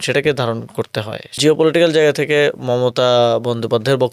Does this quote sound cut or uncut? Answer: cut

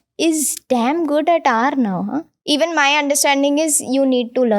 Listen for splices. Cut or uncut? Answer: cut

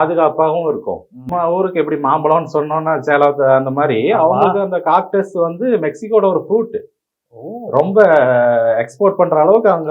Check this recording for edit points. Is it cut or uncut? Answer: cut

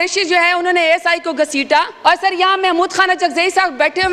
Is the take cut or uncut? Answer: cut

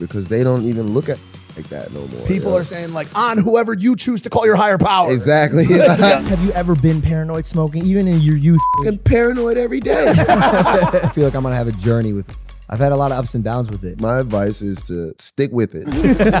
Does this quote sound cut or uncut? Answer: cut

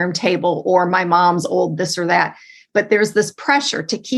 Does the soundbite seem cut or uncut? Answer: uncut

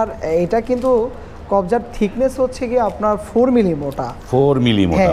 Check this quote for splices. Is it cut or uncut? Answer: uncut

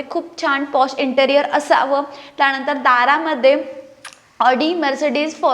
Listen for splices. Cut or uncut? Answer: uncut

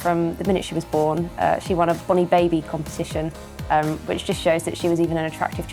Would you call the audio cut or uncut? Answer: uncut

